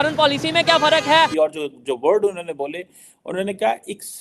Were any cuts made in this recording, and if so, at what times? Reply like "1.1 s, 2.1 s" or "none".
1.3 s